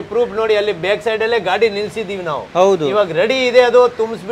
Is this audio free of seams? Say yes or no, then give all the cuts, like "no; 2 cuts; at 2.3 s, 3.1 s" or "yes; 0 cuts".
yes; 0 cuts